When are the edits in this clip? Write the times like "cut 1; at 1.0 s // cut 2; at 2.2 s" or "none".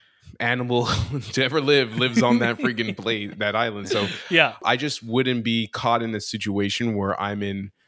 cut 1; at 4.6 s